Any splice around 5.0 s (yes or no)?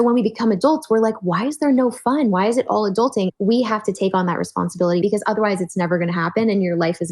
yes